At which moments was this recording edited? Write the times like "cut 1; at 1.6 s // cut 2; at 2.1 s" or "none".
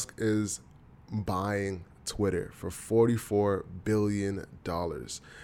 none

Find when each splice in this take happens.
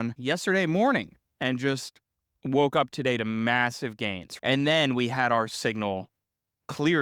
cut 1; at 4.2 s

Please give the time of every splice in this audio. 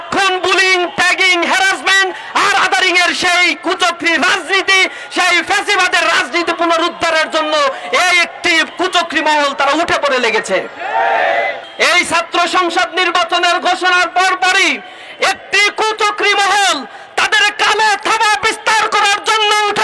cut 1; at 11.6 s

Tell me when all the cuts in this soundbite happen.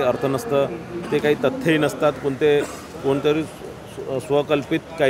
none

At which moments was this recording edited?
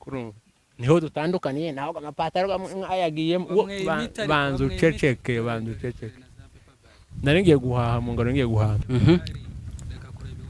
cut 1; at 8.8 s

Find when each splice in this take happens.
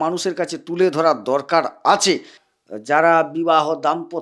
cut 1; at 2.4 s

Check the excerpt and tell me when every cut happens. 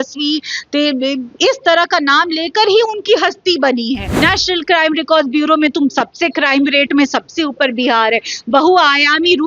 cut 1; at 4.1 s

